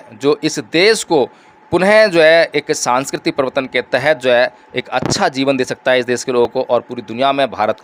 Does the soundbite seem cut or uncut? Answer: uncut